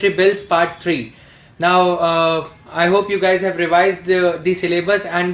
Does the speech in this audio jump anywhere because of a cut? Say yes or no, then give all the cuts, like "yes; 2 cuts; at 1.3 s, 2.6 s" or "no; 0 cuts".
no; 0 cuts